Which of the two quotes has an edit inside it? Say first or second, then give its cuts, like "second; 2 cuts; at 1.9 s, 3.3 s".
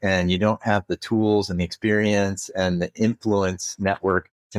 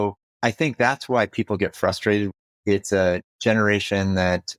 second; 1 cut; at 2.3 s